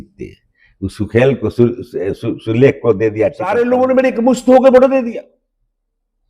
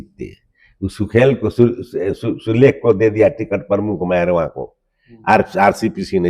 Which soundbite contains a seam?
first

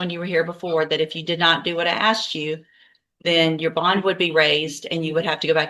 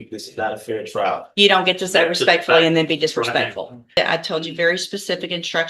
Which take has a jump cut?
second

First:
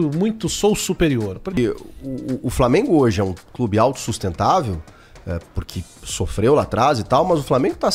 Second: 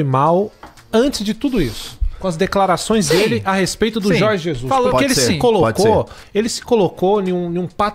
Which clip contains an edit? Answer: first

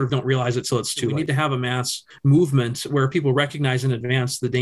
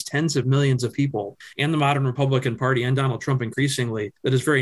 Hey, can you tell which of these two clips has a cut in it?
first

